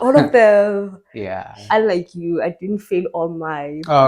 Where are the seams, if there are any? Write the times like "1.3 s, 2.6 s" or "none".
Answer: 1.6 s